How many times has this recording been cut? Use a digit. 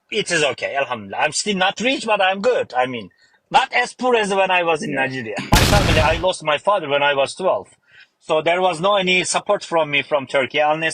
1